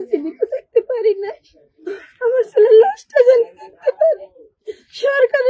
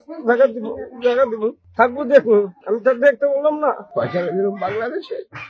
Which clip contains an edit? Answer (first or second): second